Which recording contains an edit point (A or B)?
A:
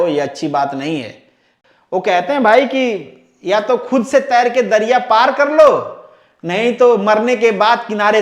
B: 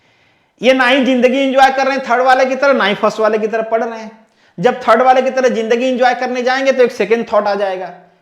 A